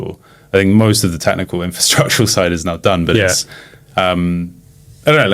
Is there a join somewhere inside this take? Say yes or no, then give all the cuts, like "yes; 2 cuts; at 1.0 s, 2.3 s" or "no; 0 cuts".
no; 0 cuts